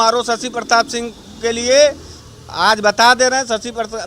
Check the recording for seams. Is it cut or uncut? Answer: uncut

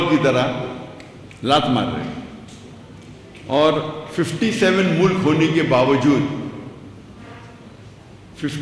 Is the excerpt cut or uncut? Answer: uncut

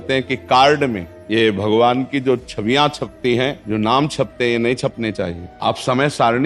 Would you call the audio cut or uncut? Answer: cut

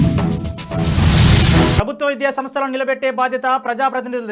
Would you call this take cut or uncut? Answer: cut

